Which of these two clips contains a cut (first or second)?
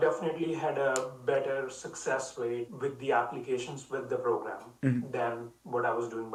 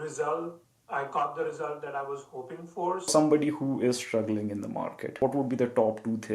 second